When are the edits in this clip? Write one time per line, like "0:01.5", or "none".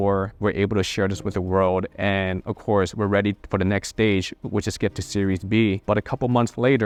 none